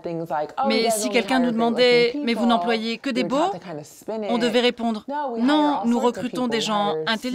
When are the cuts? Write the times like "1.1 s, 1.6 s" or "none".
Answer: none